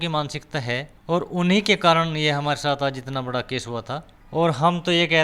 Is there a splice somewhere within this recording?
yes; 2 cuts; at 0.9 s, 4.2 s

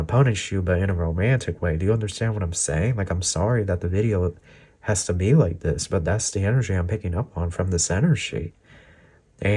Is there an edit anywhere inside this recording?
no; 0 cuts

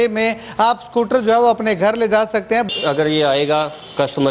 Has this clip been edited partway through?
yes; 1 cut; at 2.7 s

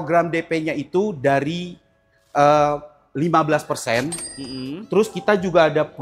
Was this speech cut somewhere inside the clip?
no; 0 cuts

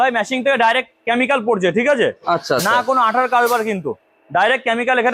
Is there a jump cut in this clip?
no; 0 cuts

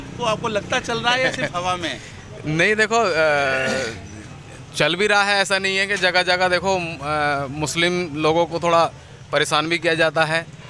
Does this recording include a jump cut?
no; 0 cuts

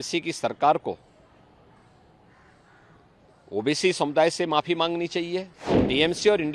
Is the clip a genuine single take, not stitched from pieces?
no; 1 cut; at 5.6 s

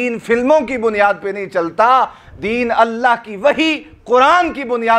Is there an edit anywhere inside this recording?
no; 0 cuts

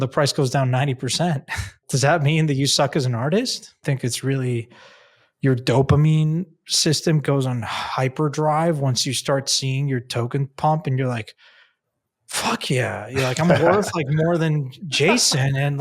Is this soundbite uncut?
no; 2 cuts; at 1.8 s, 3.8 s

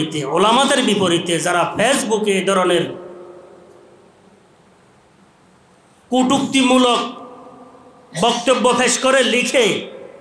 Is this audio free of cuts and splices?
yes; 0 cuts

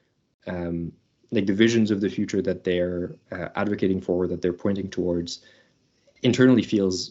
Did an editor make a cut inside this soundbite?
no; 0 cuts

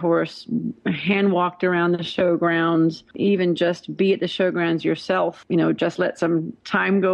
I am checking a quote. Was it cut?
yes; 2 cuts; at 3.1 s, 5.4 s

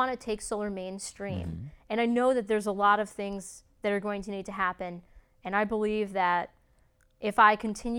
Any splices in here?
no; 0 cuts

